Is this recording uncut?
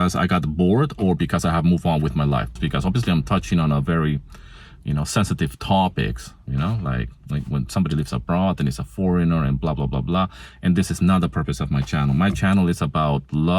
no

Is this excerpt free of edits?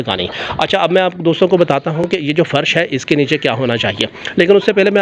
yes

